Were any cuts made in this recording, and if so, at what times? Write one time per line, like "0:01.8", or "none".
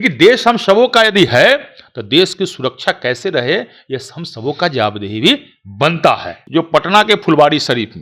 0:06.3